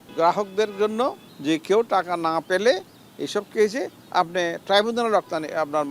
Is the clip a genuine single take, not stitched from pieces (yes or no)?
no